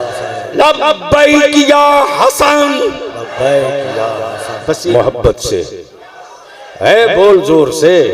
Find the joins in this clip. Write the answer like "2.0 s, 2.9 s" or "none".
4.9 s